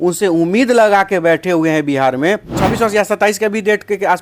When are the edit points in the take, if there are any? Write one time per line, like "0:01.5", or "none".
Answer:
0:02.6

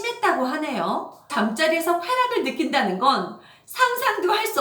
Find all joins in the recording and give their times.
0:01.2

